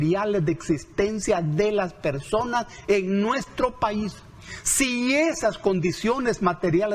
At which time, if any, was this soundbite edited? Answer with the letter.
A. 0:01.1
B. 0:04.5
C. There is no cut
C